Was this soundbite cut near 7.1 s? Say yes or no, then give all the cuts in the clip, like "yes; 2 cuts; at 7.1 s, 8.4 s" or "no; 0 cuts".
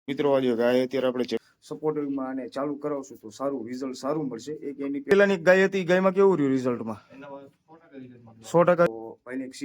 no; 3 cuts; at 1.4 s, 5.1 s, 8.9 s